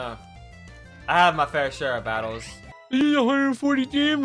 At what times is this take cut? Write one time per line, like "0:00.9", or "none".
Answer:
0:03.0